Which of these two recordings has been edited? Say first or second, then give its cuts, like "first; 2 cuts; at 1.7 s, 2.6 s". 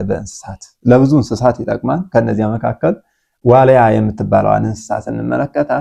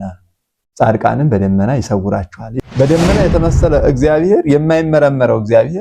second; 1 cut; at 2.5 s